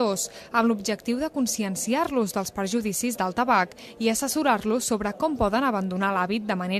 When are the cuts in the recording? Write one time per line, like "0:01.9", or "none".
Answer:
none